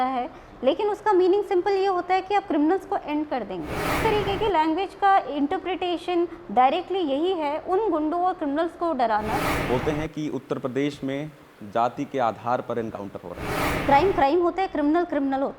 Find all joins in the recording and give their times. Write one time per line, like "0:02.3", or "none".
0:04.0
0:09.5
0:13.7